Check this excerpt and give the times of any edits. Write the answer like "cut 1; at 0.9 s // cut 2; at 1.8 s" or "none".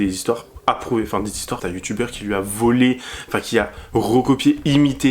cut 1; at 1.6 s